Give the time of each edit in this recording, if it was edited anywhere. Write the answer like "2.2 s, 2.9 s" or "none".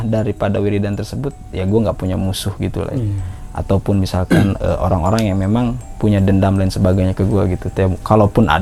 none